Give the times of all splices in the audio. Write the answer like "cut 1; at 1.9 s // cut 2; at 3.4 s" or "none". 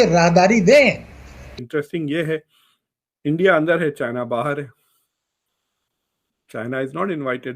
cut 1; at 1.4 s